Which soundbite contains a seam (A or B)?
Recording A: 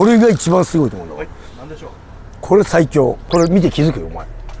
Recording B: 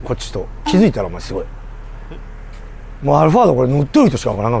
A